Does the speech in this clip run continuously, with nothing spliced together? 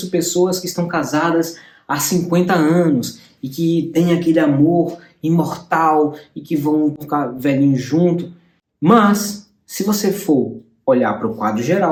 yes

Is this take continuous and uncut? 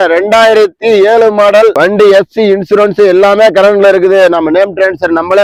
yes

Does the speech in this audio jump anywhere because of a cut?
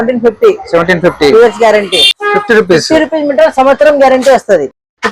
yes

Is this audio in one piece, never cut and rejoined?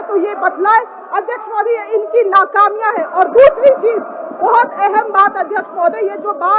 yes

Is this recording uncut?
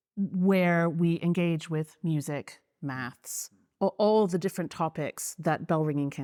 yes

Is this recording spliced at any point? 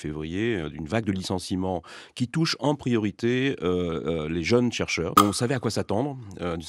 yes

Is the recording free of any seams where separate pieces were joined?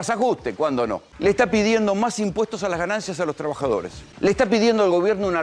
no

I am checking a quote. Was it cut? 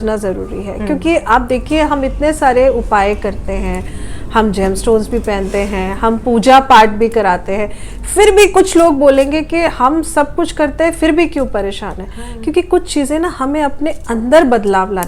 no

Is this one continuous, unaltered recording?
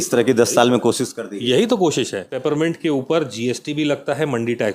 no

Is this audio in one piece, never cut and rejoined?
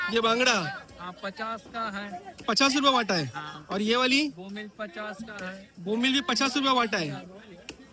yes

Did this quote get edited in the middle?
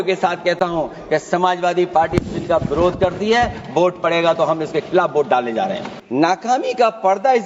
yes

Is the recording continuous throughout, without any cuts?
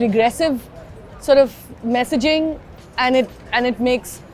yes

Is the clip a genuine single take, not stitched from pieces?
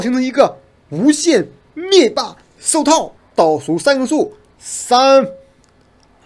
no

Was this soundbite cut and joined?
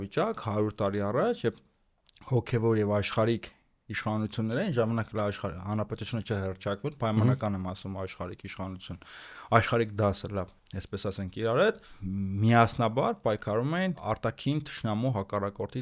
no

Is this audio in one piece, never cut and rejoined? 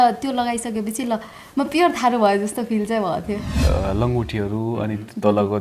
no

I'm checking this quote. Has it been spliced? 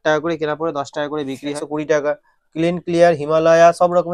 yes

